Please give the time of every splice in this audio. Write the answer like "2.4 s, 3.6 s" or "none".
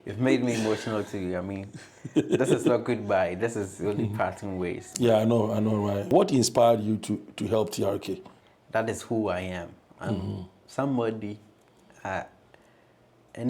6.1 s, 8.3 s